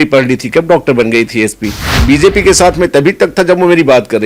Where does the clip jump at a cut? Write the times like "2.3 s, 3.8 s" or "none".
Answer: 1.9 s